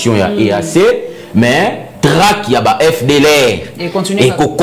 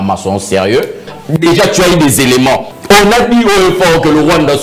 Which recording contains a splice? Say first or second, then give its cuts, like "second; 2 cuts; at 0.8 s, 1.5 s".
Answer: second; 2 cuts; at 1.1 s, 2.7 s